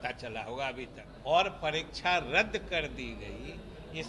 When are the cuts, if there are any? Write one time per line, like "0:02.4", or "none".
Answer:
0:01.0